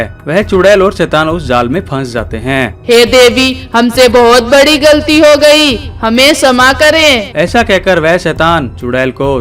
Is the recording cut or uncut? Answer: cut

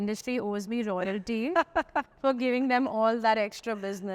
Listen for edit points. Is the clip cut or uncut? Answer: uncut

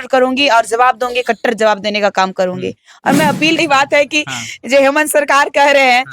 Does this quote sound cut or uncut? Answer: cut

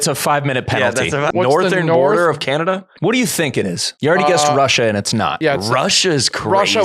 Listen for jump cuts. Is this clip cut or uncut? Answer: cut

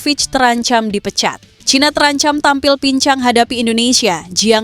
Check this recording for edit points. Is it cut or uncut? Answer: cut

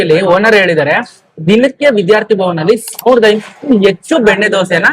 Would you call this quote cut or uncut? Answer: uncut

